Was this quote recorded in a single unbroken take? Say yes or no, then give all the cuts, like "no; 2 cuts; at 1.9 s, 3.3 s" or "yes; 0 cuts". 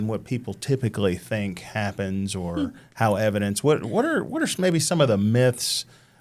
yes; 0 cuts